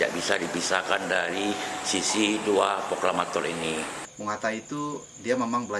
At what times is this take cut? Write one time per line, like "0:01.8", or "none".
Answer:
0:04.0

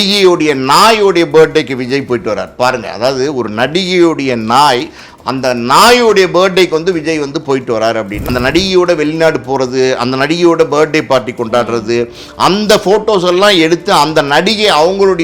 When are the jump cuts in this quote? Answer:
0:08.3

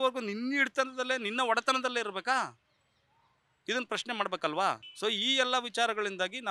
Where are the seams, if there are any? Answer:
none

